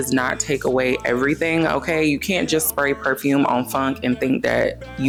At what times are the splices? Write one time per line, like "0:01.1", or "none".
none